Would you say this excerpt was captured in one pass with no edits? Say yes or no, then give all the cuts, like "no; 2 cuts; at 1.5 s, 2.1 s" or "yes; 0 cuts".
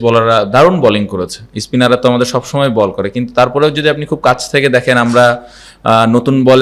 yes; 0 cuts